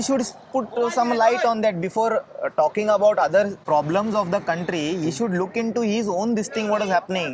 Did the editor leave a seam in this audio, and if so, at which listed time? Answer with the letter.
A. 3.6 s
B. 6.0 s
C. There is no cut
A